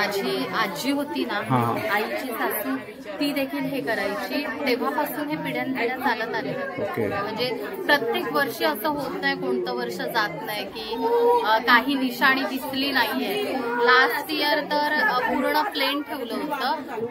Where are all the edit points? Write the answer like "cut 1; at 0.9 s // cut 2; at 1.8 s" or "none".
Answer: none